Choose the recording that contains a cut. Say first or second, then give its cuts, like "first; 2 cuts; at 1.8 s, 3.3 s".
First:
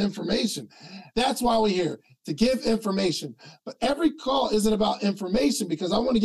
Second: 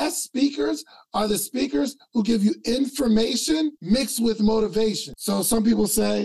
second; 2 cuts; at 3.8 s, 5.1 s